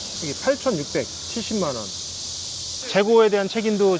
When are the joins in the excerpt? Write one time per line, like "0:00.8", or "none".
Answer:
0:02.7